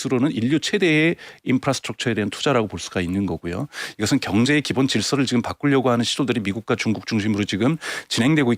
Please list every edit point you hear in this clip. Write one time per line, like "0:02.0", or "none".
none